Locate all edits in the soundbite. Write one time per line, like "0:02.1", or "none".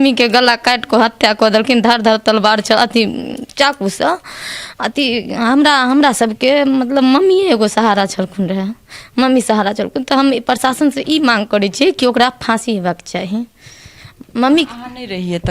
none